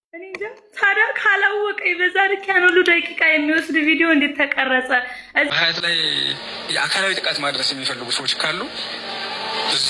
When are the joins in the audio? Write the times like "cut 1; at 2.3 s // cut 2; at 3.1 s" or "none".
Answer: cut 1; at 5.5 s